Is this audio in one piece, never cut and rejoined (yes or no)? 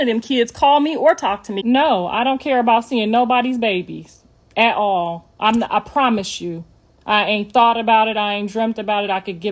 no